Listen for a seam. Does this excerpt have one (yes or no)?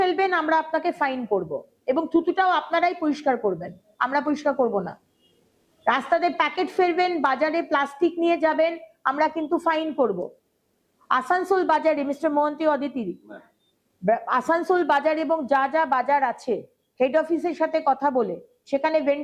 no